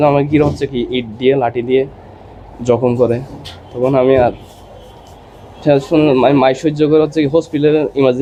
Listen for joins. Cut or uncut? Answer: uncut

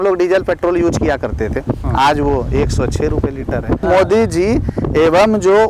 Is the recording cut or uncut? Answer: cut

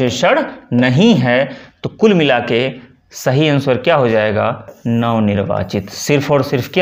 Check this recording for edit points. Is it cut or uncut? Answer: uncut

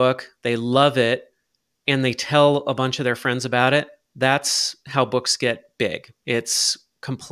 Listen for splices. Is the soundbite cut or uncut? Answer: uncut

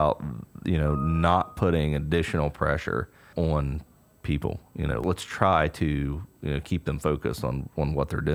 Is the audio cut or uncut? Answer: cut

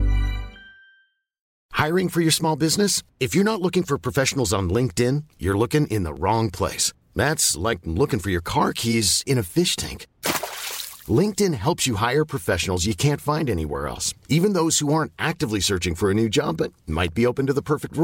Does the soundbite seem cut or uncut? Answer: cut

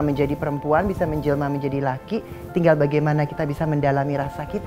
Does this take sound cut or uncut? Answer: uncut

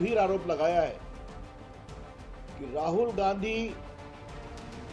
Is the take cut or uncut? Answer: cut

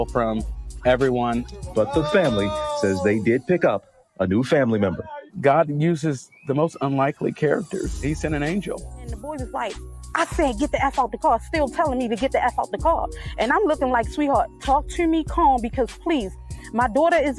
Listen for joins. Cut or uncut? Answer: cut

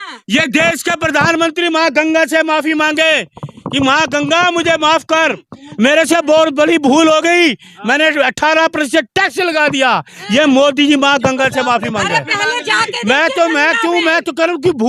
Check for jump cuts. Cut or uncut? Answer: uncut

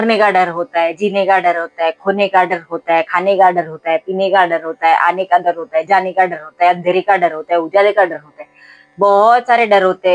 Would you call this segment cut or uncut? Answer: uncut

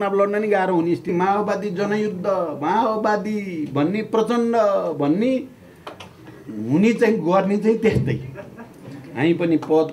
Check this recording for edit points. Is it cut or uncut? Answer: cut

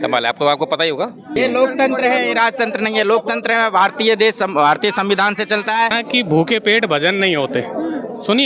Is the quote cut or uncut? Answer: cut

